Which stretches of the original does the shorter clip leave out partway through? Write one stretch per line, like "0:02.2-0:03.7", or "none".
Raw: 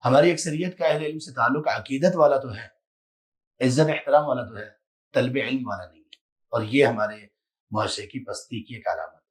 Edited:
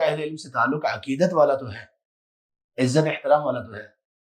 none

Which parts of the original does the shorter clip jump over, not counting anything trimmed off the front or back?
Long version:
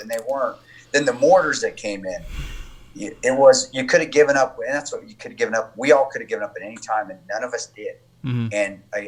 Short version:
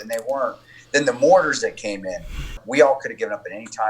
0:02.6-0:05.7

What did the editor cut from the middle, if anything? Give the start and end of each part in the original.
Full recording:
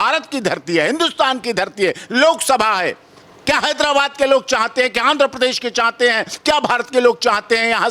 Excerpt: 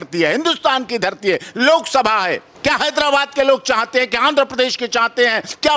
0:03.0-0:03.3

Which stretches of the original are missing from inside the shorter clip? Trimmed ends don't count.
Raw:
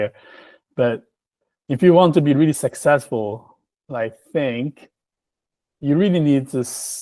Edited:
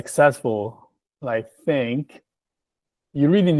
none

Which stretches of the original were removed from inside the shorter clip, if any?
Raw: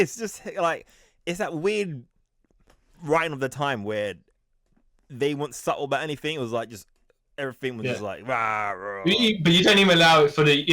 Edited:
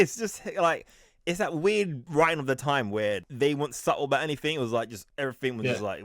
0:02.0-0:02.9
0:04.2-0:05.1
0:06.8-0:07.2

